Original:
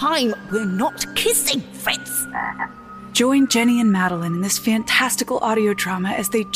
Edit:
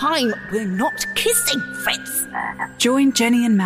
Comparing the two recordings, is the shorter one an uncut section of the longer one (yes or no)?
no